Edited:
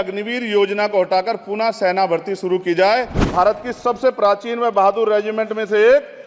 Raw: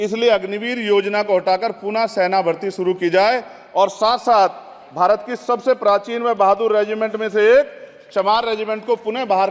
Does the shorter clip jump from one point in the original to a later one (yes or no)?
yes